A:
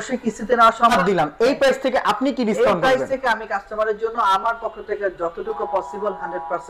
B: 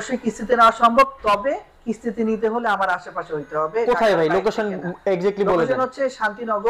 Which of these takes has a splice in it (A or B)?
A